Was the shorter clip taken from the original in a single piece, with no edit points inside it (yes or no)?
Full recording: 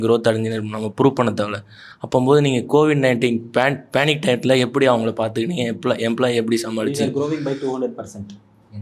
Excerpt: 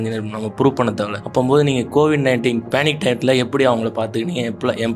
no